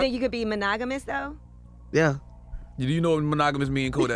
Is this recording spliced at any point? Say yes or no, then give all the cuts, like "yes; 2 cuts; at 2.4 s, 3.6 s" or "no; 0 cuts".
no; 0 cuts